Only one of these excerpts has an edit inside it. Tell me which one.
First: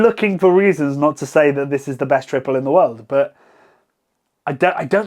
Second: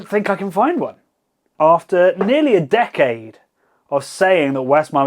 second; 1 cut; at 1.5 s

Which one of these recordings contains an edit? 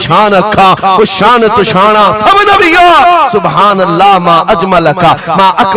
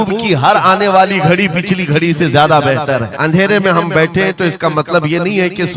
second; 1 cut; at 3.1 s

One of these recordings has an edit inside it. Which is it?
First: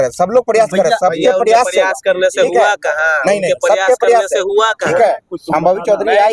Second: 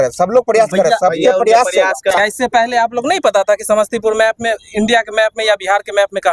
second; 1 cut; at 2.1 s

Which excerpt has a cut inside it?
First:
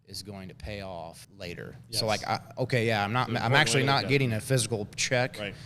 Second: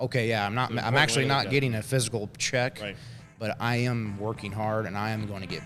first; 1 cut; at 1.2 s

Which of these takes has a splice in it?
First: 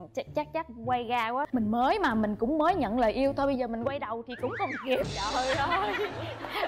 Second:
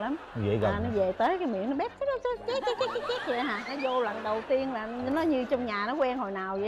first; 1 cut; at 1.5 s

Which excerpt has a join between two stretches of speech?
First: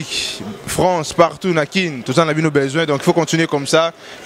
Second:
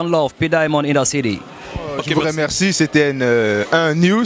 second; 1 cut; at 2.1 s

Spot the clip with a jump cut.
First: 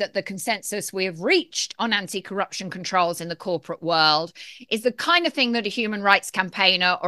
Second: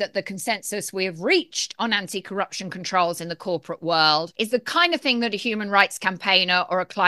second; 1 cut; at 4.3 s

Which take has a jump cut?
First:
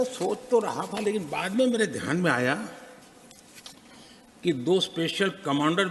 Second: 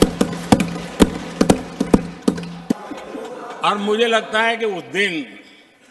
second; 1 cut; at 2.7 s

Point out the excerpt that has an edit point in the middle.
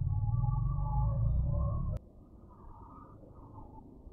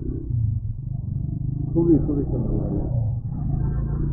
first; 1 cut; at 2.0 s

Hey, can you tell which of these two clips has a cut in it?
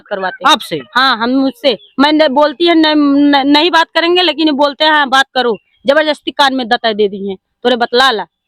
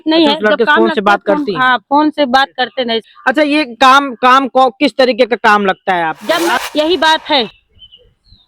second; 2 cuts; at 3.0 s, 6.5 s

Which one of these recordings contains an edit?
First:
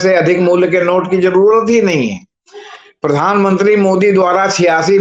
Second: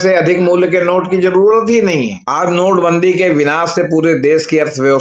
second; 1 cut; at 2.2 s

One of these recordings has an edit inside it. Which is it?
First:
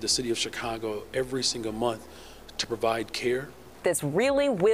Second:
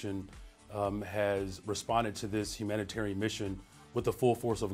first; 1 cut; at 3.7 s

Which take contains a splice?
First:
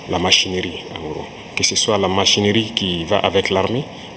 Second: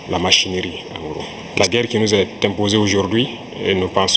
second; 1 cut; at 1.4 s

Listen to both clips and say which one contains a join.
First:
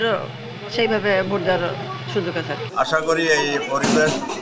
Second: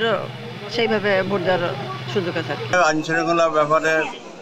first; 1 cut; at 2.6 s

